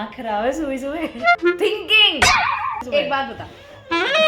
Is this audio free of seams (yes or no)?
no